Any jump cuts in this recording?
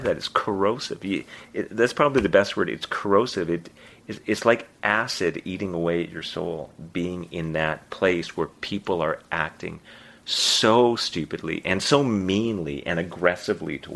no; 0 cuts

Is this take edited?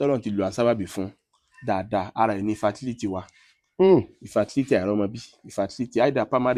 no; 0 cuts

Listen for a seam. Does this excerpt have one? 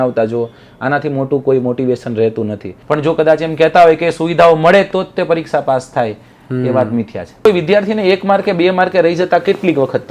yes; 2 cuts; at 2.7 s, 7.4 s

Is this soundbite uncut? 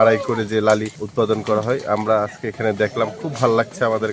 no; 1 cut; at 1.0 s

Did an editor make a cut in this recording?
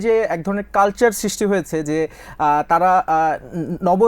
no; 0 cuts

